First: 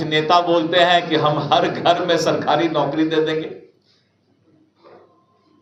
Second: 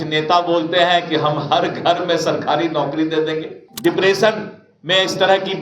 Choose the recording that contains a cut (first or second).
second